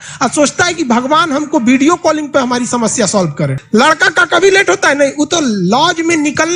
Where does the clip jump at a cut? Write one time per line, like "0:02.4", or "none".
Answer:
0:03.6

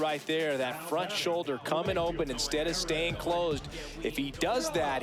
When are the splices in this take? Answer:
none

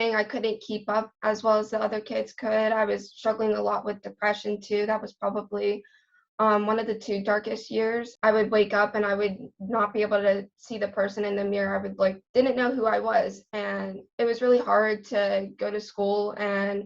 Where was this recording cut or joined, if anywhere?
0:12.2

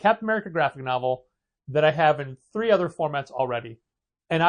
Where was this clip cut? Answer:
none

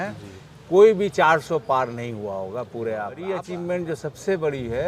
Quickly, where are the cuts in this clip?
0:03.4

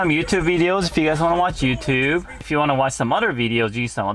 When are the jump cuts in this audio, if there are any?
0:02.4

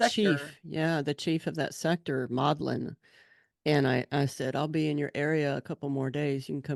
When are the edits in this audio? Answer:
none

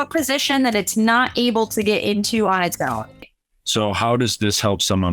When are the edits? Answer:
0:03.4

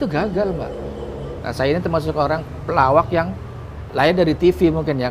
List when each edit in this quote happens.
0:01.4

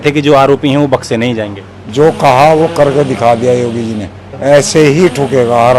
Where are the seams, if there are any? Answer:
0:04.2

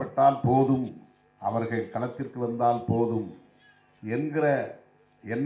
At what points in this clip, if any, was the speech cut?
none

